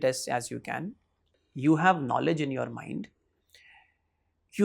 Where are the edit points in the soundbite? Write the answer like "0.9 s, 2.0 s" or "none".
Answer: 1.3 s

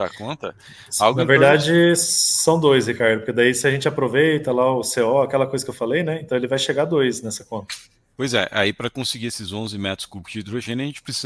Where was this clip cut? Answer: none

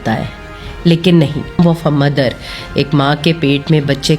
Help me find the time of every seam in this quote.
1.6 s

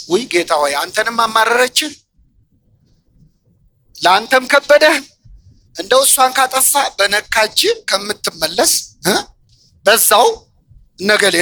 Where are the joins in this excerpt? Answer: none

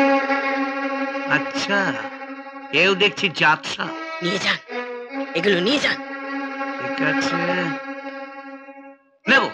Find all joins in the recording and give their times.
none

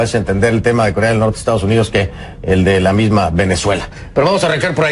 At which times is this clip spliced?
3.1 s

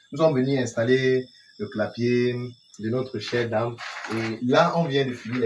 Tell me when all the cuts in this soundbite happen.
none

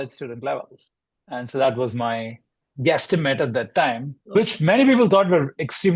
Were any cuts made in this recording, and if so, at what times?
4.2 s

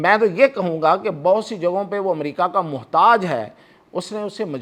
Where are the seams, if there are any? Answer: none

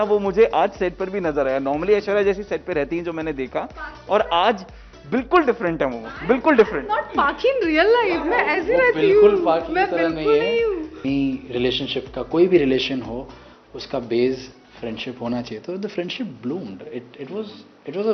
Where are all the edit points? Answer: 11.0 s

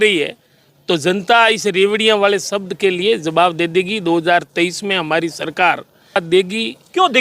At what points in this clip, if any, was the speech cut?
6.2 s

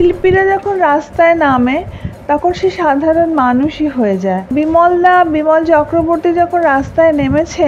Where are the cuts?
4.5 s

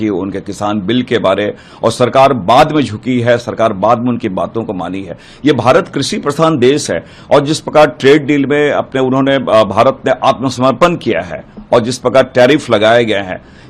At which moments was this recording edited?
none

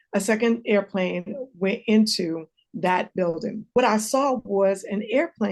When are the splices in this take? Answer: 3.7 s

